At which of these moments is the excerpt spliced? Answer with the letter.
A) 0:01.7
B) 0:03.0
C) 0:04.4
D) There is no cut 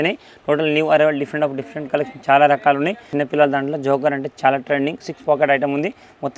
B